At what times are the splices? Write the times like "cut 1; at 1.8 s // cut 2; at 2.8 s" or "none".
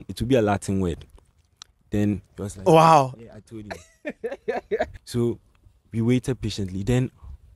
cut 1; at 5.0 s